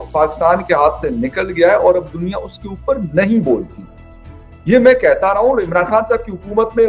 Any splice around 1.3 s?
no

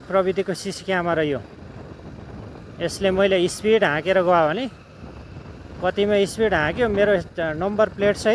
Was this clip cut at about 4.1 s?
no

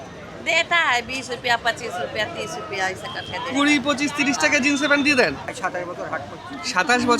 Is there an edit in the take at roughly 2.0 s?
no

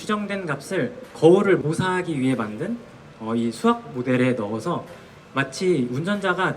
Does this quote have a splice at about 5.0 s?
no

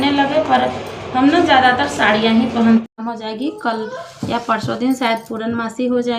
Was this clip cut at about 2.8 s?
yes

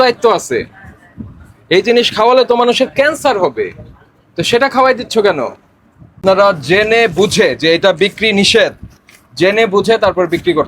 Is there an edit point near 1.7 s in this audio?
no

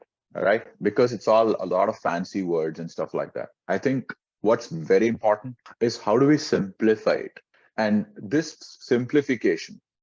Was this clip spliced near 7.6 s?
no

